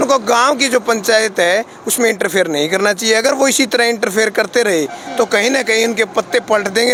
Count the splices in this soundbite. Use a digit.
0